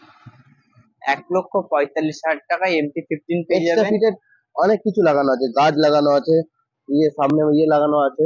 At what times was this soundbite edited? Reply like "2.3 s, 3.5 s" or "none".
none